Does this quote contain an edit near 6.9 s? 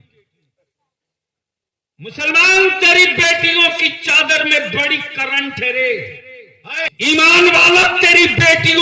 yes; 1 cut; at 6.9 s

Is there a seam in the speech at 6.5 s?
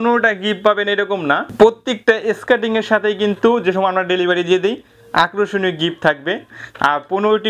yes; 2 cuts; at 1.5 s, 6.5 s

